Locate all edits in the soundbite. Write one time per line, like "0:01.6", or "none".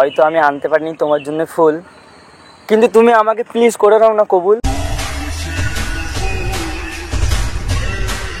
none